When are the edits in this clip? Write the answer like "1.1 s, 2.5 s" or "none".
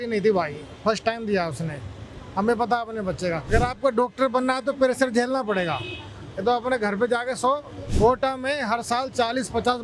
3.4 s, 7.8 s